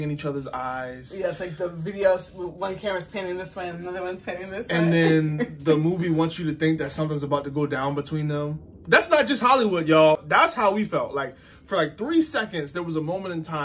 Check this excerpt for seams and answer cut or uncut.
cut